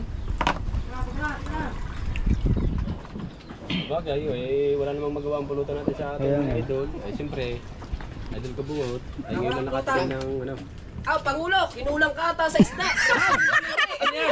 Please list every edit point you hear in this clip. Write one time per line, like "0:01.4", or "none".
none